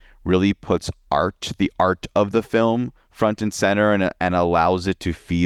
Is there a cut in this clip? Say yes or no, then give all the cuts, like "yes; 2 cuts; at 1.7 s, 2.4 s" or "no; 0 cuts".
no; 0 cuts